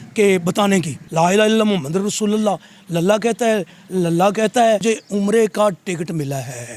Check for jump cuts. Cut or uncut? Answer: cut